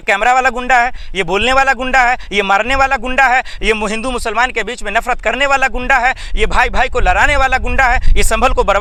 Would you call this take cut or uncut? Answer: uncut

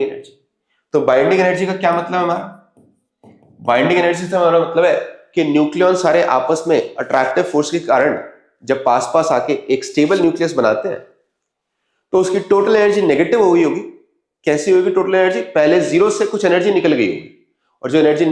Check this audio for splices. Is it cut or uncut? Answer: uncut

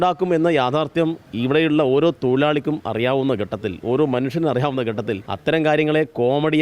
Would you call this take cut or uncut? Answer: cut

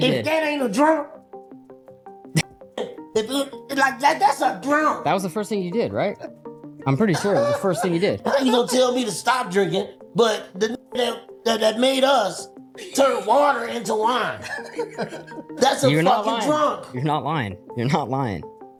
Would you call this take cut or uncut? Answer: uncut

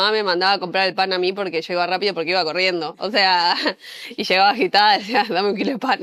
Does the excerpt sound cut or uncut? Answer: uncut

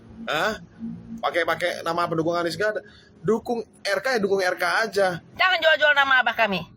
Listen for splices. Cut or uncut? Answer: cut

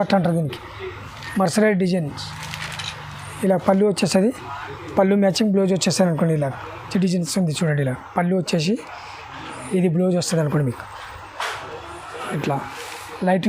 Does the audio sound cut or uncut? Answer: cut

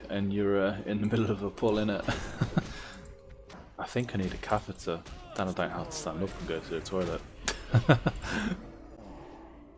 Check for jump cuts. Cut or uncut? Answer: uncut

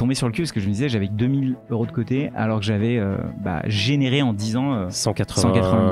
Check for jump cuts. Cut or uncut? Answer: uncut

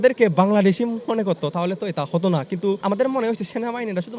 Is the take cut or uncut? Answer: cut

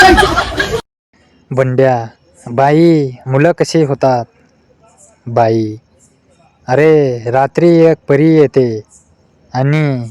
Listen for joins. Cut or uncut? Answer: cut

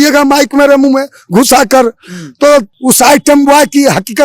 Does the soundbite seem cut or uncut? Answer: cut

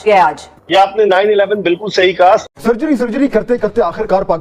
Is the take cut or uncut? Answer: cut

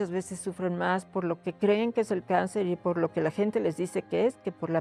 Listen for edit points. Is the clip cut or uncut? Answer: uncut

